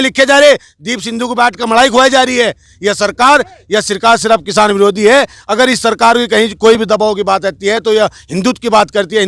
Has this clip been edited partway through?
no; 0 cuts

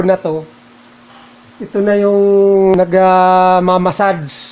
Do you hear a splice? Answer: yes; 1 cut; at 2.8 s

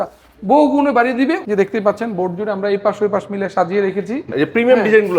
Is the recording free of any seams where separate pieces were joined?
no; 2 cuts; at 1.4 s, 4.3 s

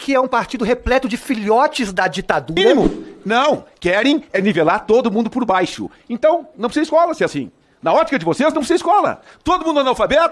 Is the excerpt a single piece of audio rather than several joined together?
no; 1 cut; at 2.7 s

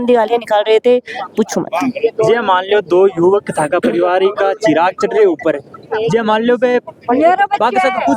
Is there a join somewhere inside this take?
no; 0 cuts

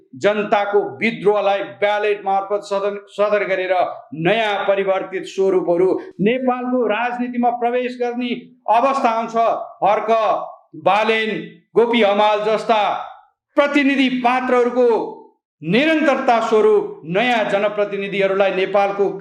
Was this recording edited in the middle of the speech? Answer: no; 0 cuts

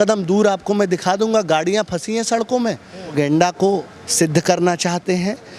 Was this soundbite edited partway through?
yes; 1 cut; at 3.1 s

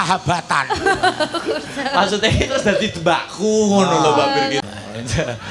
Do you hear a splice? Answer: yes; 1 cut; at 4.6 s

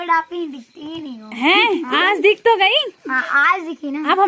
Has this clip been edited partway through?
no; 0 cuts

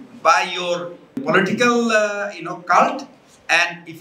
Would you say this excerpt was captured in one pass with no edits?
no; 1 cut; at 1.2 s

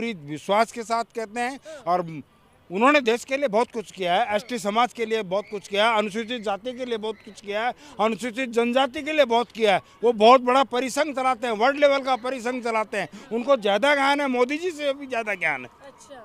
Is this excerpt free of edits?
yes; 0 cuts

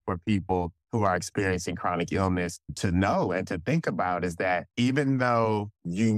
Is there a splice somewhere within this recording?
yes; 1 cut; at 4.7 s

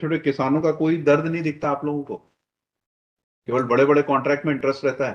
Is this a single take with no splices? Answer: yes; 0 cuts

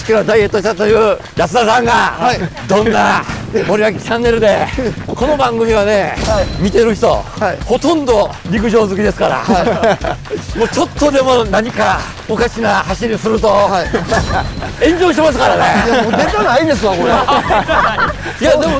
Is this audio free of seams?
no; 8 cuts; at 1.3 s, 2.5 s, 3.4 s, 5.0 s, 6.5 s, 7.6 s, 8.4 s, 12.1 s

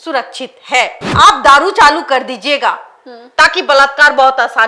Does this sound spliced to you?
yes; 1 cut; at 1.0 s

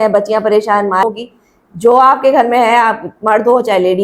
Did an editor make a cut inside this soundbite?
yes; 1 cut; at 1.0 s

